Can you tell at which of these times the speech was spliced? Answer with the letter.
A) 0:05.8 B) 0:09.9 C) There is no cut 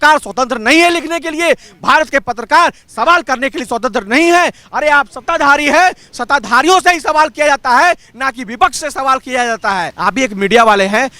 B